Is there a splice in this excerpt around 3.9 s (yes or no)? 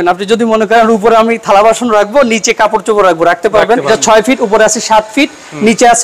yes